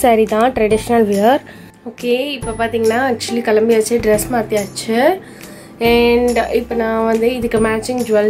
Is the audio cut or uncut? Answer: cut